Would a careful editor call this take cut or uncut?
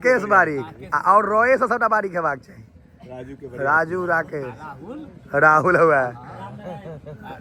uncut